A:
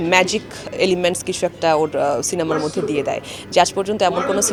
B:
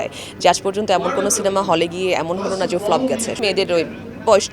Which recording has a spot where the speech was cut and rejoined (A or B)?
B